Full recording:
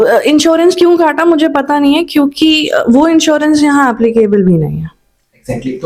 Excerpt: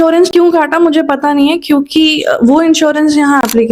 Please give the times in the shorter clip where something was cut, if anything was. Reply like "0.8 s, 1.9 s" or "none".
none